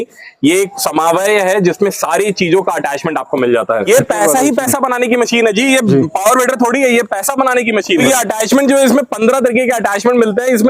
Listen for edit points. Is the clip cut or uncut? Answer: cut